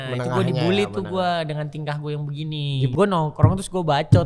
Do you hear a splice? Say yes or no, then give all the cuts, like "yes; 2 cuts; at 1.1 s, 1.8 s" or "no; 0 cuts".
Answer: yes; 1 cut; at 2.9 s